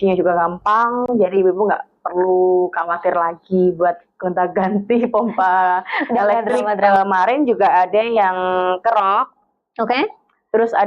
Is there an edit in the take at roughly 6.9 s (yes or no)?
yes